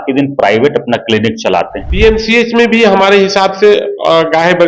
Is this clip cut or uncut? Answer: cut